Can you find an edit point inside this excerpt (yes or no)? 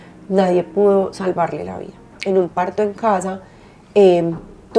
yes